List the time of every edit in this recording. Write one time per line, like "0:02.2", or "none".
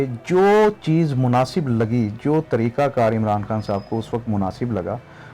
none